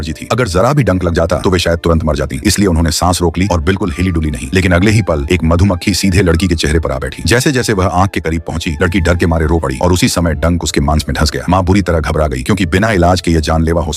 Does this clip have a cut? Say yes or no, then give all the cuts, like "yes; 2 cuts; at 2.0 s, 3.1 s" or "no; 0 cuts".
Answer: no; 0 cuts